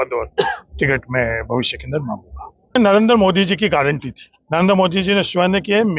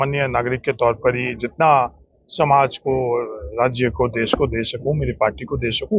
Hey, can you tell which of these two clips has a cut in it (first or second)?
first